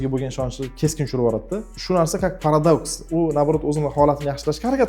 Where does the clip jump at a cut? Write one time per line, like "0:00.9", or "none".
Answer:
0:01.7